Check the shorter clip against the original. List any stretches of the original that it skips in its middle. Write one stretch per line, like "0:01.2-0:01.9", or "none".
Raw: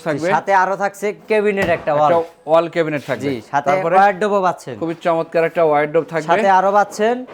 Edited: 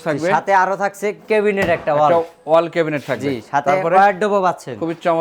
none